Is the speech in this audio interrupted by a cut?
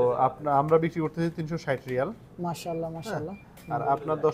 no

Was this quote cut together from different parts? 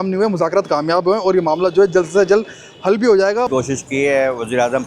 yes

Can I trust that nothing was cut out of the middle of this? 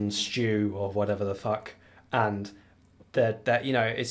yes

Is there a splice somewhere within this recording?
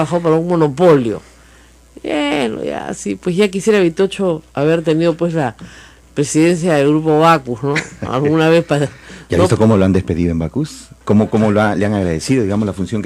no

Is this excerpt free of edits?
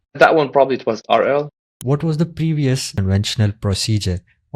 no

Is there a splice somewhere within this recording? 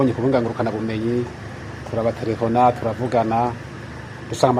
no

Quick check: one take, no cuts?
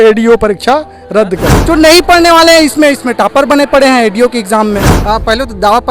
no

